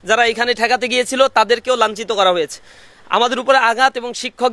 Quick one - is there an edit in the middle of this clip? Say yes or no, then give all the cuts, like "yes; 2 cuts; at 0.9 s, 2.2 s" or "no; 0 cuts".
no; 0 cuts